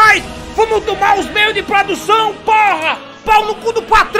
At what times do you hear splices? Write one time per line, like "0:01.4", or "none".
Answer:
none